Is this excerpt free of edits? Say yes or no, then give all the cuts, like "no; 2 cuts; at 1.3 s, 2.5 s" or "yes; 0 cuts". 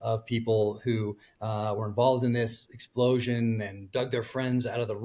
yes; 0 cuts